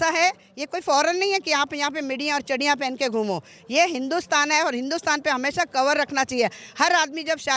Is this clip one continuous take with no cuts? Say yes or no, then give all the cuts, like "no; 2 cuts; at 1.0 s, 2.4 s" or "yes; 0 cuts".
yes; 0 cuts